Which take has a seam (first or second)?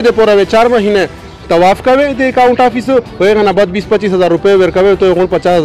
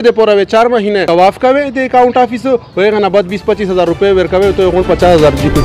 second